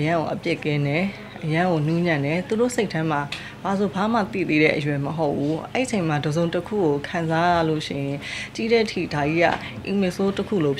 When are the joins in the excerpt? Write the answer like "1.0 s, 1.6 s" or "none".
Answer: none